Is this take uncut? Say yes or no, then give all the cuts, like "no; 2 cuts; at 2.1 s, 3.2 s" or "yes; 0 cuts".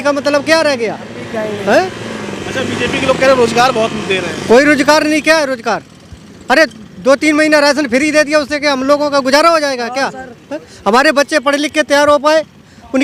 yes; 0 cuts